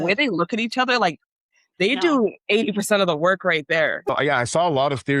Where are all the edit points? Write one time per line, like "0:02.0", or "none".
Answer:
0:04.0